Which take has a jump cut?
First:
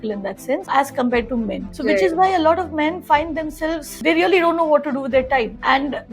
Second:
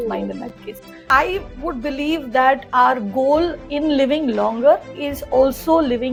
first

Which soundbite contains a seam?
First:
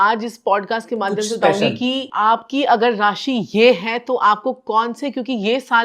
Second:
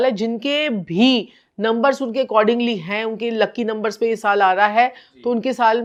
first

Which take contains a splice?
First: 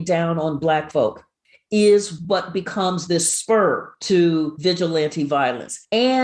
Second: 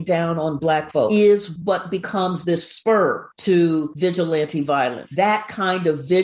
second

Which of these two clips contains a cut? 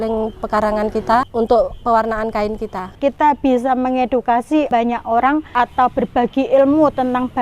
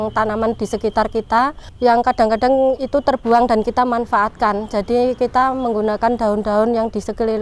first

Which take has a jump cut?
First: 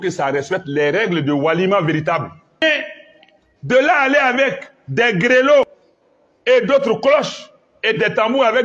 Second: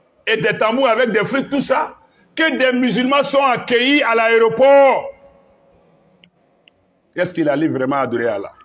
first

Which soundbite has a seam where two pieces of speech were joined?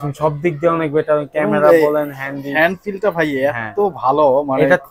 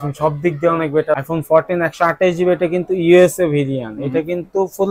second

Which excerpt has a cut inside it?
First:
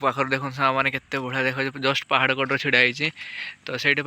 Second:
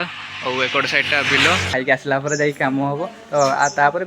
second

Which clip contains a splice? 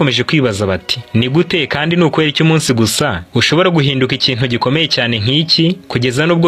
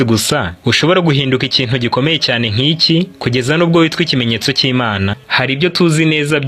second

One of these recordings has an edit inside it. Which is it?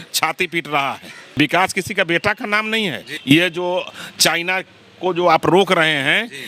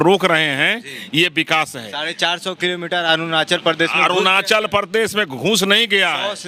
first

